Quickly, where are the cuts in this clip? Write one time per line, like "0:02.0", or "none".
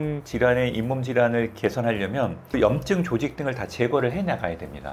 0:02.6